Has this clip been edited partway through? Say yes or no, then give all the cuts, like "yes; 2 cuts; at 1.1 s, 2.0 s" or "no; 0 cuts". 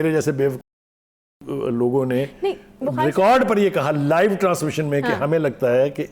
no; 0 cuts